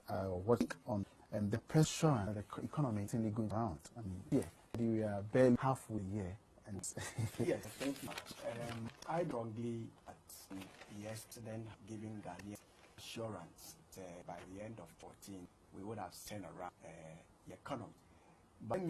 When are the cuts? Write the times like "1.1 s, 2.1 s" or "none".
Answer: 3.2 s